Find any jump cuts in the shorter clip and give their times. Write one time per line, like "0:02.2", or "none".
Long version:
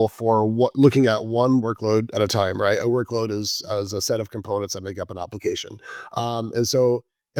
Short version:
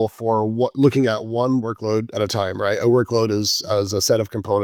none